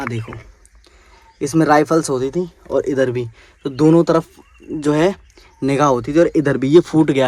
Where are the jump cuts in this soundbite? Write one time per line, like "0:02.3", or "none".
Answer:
none